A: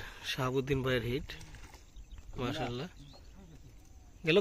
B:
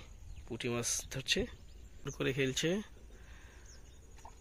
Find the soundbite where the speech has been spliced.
B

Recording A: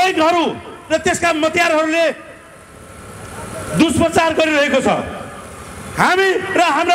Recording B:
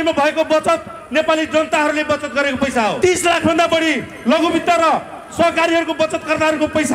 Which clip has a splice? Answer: B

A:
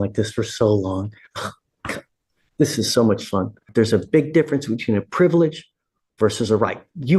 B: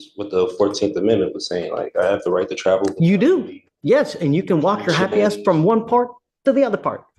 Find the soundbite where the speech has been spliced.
A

